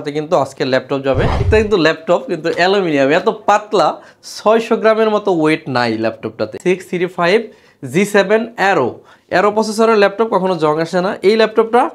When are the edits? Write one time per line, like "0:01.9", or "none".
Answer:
0:01.4
0:06.5